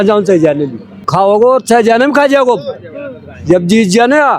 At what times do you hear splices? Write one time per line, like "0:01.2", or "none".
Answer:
0:01.0